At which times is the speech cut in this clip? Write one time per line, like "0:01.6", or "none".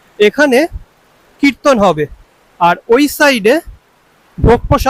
none